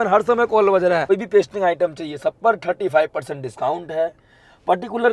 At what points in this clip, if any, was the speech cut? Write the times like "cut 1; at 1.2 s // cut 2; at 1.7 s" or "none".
cut 1; at 1.0 s